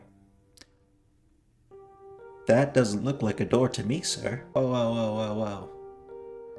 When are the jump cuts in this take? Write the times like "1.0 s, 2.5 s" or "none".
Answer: 4.4 s

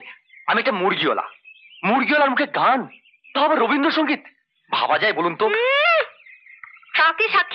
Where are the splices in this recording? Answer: none

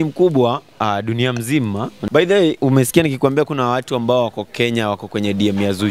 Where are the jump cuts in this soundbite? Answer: 2.0 s

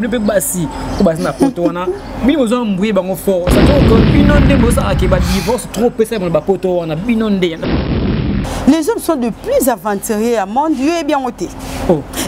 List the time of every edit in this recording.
7.9 s

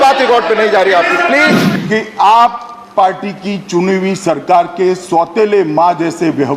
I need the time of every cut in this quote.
1.7 s

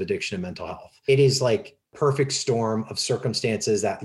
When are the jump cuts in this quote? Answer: 1.1 s, 1.9 s

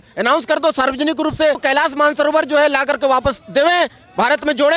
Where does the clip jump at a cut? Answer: 1.6 s

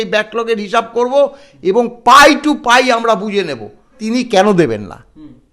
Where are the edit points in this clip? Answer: 3.9 s

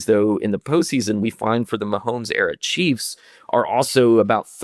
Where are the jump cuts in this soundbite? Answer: none

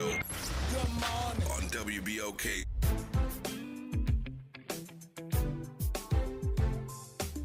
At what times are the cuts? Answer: none

